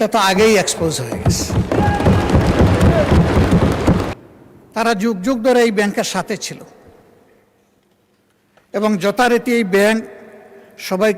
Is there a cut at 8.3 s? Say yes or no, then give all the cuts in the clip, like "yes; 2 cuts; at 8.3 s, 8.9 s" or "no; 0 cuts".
no; 1 cut; at 4.1 s